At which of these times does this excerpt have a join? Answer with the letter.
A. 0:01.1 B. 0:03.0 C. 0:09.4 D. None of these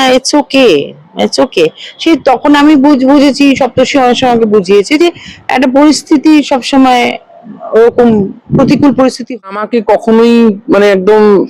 C